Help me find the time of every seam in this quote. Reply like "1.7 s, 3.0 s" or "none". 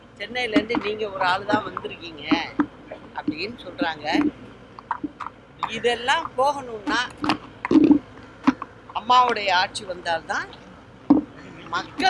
none